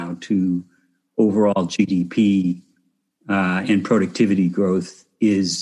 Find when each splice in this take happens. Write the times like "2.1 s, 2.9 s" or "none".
none